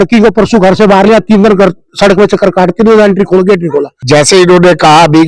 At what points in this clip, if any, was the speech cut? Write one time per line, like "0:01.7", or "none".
0:03.9